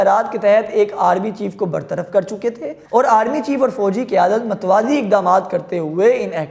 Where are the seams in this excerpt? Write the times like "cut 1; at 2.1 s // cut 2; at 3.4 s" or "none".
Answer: none

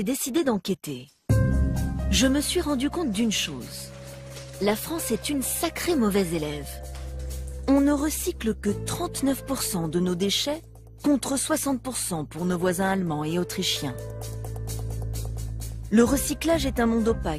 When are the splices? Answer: none

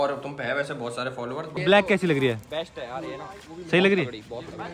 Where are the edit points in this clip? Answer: cut 1; at 1.5 s

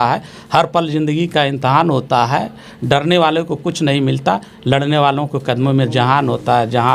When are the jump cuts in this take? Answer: none

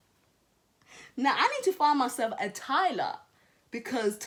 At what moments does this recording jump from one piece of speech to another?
none

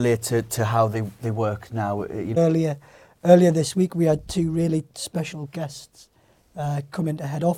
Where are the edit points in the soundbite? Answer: cut 1; at 2.3 s

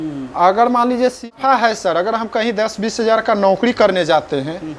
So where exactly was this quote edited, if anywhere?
cut 1; at 1.3 s

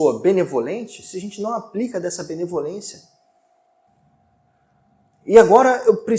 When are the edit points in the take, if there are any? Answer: cut 1; at 3.9 s

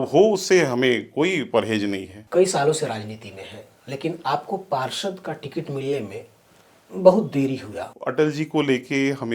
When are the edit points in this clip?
cut 1; at 2.1 s // cut 2; at 7.9 s

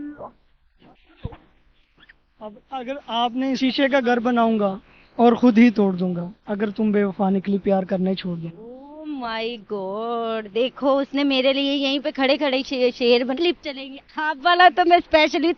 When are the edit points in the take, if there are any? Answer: cut 1; at 3.6 s // cut 2; at 13.4 s

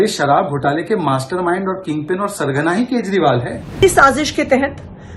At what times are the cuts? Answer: cut 1; at 3.8 s

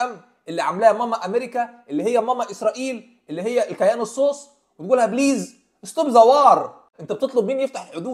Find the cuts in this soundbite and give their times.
cut 1; at 6.9 s

